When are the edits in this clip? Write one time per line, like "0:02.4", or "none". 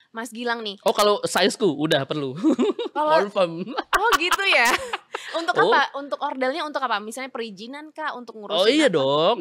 none